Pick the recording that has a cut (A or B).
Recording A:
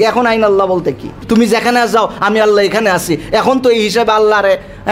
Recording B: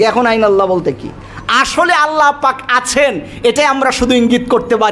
A